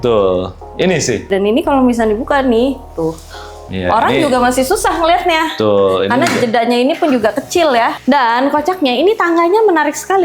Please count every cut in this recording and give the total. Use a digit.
2